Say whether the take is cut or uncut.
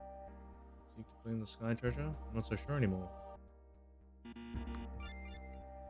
cut